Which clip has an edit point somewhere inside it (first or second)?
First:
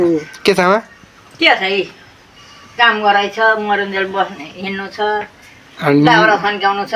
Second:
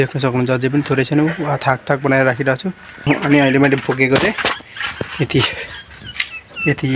second